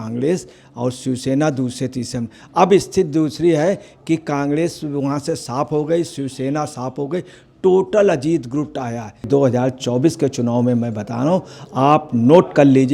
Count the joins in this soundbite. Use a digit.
1